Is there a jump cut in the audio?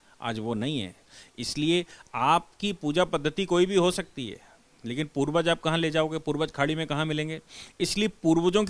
no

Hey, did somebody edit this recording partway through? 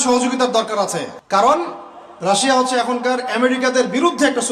yes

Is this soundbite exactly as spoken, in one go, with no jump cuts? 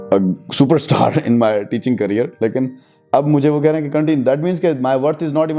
yes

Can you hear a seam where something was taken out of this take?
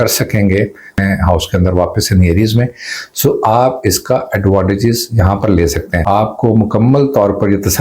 yes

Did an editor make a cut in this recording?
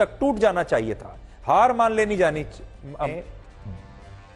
yes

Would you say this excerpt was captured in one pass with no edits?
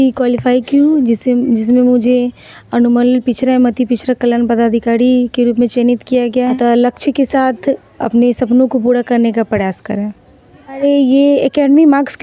no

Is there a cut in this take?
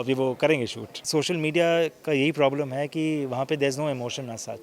yes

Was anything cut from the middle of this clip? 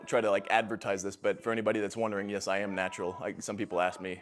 no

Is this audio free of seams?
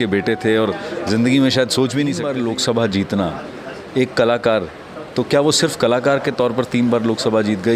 no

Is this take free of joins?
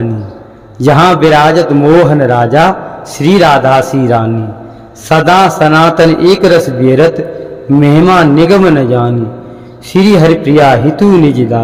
yes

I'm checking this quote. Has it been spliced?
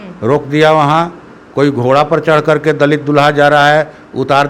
no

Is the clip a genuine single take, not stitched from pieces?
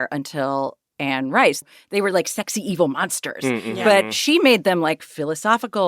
no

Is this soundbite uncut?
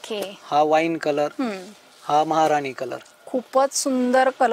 yes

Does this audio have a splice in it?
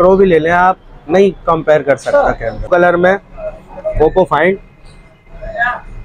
yes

